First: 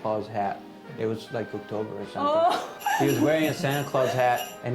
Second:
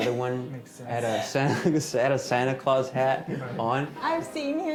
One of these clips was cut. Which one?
first; 1 cut; at 2.7 s

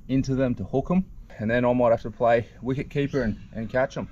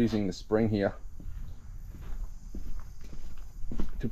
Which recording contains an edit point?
first; 1 cut; at 1.3 s

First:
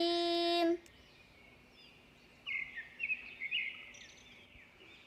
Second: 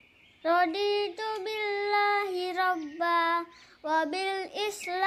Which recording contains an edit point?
first; 2 cuts; at 1.0 s, 2.7 s

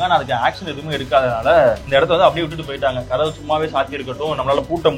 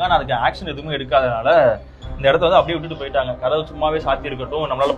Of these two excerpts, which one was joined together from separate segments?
first; 1 cut; at 1.8 s

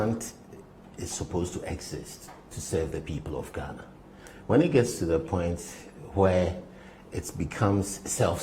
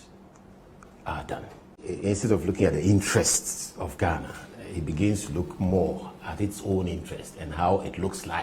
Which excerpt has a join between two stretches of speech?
second; 1 cut; at 1.6 s

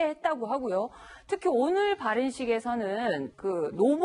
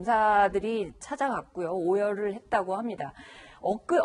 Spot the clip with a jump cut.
first; 1 cut; at 1.1 s

